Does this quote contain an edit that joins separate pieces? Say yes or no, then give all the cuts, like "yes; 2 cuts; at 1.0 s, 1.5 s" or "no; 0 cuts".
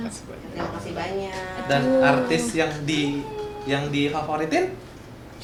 no; 0 cuts